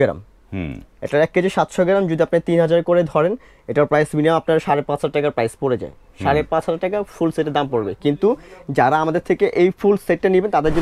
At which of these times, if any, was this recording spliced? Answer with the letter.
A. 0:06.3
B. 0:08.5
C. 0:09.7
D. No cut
D